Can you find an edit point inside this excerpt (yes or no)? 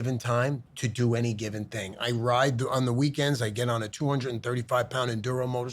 no